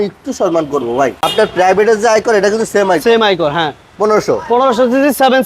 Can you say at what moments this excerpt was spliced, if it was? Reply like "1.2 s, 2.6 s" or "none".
1.2 s